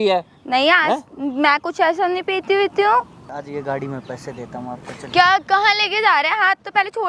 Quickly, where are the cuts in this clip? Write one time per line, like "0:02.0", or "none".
0:03.2